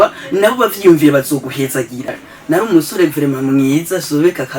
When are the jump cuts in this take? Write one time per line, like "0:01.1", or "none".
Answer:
0:02.1

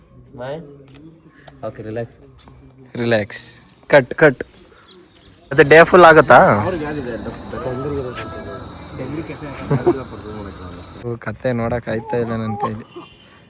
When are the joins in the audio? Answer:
0:05.6
0:11.1

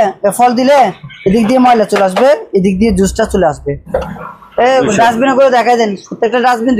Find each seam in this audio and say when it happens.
0:04.2

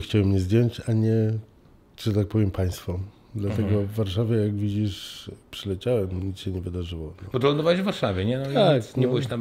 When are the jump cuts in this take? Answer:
none

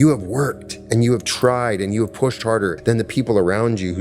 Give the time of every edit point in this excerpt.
0:02.8

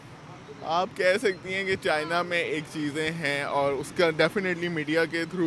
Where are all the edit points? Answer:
none

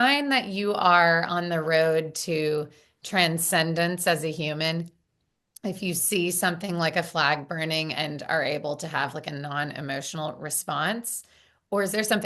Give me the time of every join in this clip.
none

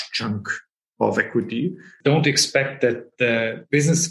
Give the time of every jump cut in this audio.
0:01.9

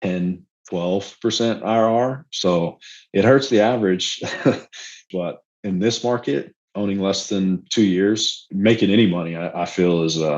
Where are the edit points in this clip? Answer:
0:05.0
0:08.4

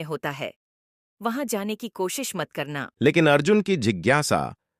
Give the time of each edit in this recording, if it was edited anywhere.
none

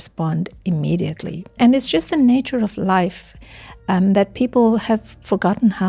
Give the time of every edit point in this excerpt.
0:01.5

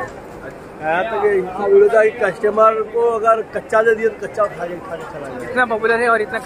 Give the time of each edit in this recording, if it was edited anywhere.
none

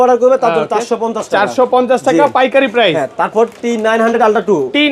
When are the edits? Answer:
none

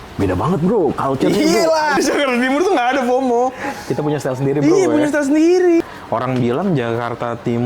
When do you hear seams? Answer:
0:02.0
0:05.8

